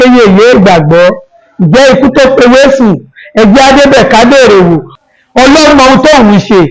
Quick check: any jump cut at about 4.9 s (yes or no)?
yes